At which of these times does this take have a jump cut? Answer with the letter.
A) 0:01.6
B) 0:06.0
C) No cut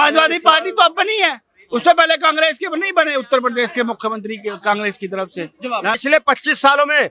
B